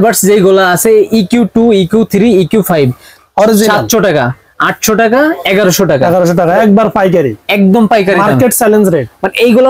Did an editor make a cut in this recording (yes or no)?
no